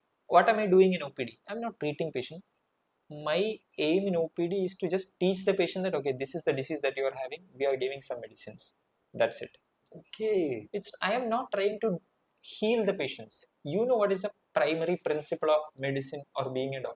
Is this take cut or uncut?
uncut